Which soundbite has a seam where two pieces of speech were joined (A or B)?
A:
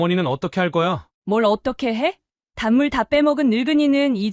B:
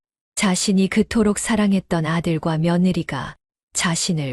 A